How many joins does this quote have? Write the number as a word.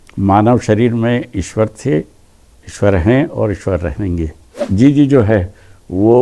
one